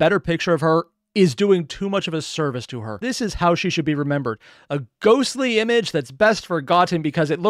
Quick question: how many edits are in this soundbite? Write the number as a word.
one